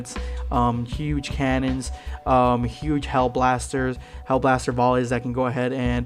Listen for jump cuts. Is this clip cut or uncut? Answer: uncut